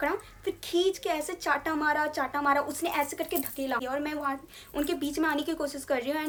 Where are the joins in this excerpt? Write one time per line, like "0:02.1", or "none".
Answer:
none